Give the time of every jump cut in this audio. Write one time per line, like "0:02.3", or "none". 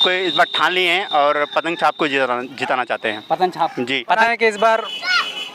0:04.2